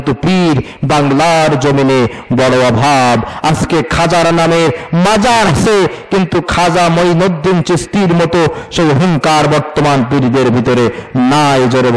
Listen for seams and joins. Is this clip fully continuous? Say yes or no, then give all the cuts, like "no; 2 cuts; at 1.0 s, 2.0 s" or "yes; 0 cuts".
yes; 0 cuts